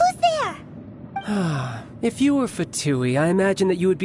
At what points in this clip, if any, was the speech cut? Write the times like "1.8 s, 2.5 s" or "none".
1.2 s